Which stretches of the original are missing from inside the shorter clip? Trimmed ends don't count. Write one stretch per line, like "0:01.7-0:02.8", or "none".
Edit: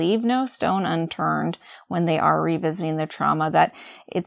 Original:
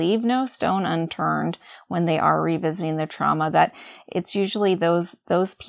none